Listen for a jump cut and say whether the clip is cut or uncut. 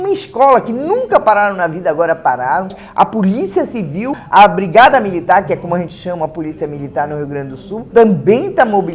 cut